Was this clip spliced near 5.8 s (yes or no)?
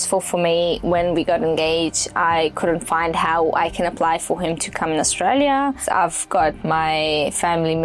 yes